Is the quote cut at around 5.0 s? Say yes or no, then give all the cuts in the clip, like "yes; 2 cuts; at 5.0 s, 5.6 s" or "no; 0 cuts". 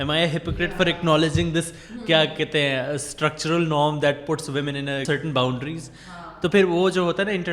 yes; 1 cut; at 5.0 s